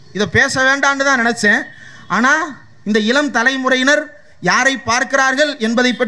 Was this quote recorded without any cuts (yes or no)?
yes